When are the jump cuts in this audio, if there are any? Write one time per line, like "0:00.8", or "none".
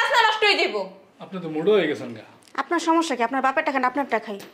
none